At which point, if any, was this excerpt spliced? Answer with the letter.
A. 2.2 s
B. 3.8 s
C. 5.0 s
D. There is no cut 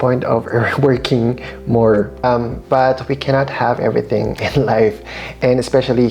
A